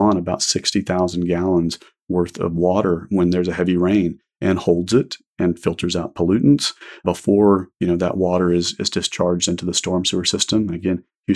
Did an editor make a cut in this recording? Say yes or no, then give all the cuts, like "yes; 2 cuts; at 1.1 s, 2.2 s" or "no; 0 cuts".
no; 0 cuts